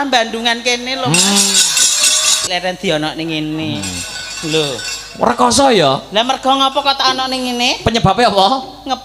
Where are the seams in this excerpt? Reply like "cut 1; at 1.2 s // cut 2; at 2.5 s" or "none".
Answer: cut 1; at 2.5 s